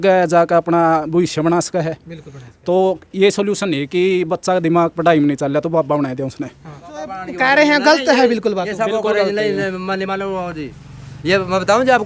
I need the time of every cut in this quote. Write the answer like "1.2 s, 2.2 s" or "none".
7.2 s